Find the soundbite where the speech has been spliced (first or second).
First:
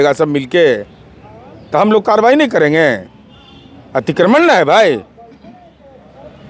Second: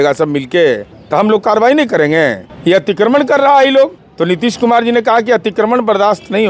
second